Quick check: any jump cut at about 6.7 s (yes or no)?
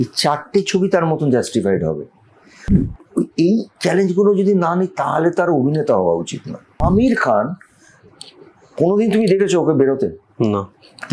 yes